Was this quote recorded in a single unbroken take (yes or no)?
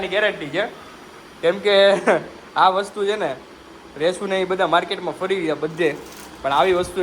yes